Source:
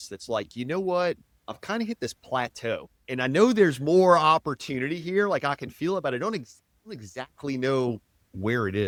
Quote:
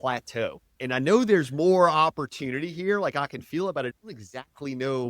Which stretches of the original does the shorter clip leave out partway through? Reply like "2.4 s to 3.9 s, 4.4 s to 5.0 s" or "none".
6.2 s to 6.7 s